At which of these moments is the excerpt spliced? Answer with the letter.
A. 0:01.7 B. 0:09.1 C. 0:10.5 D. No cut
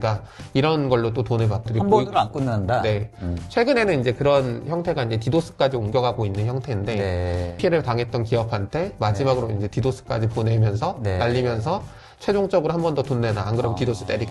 A